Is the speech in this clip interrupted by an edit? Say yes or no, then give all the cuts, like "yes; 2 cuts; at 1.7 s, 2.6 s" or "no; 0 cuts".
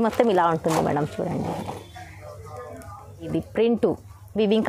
yes; 1 cut; at 3.3 s